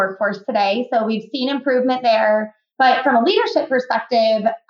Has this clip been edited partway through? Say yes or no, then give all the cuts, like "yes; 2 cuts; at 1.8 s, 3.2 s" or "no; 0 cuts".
yes; 1 cut; at 2.6 s